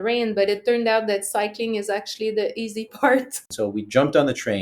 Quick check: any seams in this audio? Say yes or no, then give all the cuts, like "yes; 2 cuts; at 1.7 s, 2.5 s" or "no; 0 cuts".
yes; 1 cut; at 3.4 s